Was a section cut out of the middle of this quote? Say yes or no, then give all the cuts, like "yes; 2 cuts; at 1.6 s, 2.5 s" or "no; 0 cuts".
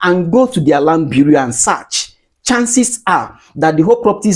no; 0 cuts